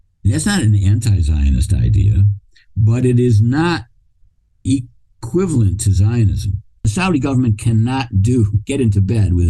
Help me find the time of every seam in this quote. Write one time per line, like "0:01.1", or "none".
0:06.9